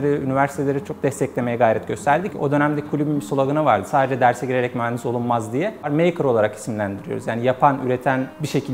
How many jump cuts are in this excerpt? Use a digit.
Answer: 2